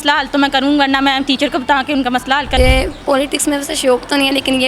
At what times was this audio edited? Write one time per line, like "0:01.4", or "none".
0:02.5